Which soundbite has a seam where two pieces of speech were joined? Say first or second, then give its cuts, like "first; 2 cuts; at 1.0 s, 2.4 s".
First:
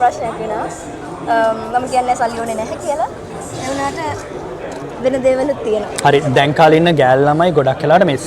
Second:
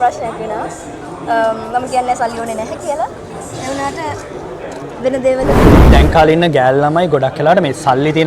second; 1 cut; at 5.8 s